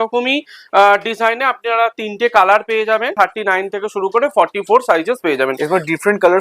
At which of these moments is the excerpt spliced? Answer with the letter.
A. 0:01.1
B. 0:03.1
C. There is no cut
B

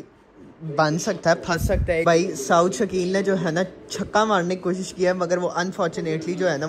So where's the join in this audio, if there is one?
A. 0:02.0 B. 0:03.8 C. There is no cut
A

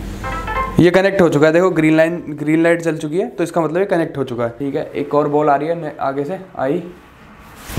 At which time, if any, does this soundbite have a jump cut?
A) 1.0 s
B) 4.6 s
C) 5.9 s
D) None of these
B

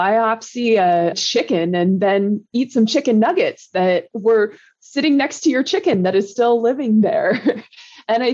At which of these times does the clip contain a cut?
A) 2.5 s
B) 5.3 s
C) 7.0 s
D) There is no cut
A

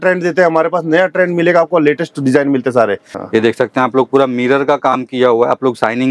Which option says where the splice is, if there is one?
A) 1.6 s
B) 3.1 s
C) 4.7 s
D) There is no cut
B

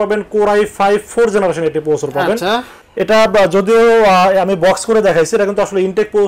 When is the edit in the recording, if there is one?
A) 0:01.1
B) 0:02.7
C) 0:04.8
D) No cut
D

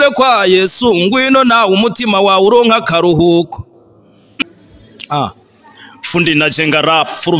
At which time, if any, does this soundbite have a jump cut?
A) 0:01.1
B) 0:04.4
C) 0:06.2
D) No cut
B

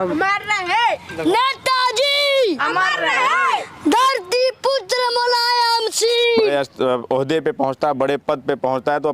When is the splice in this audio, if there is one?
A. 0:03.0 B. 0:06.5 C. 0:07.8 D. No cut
B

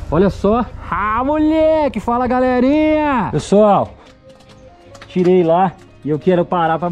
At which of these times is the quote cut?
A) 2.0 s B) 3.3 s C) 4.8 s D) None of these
B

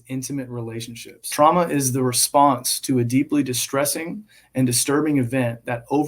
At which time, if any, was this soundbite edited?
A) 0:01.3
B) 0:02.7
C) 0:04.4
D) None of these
A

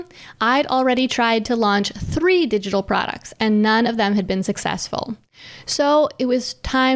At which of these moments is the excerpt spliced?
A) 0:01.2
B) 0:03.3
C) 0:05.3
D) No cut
D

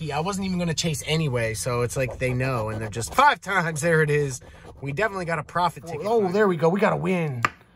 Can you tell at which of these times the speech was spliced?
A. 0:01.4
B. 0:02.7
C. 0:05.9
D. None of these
C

